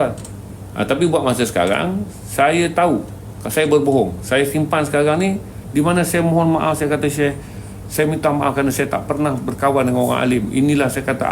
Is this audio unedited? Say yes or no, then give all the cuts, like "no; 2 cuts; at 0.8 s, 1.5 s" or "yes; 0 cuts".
no; 1 cut; at 5.6 s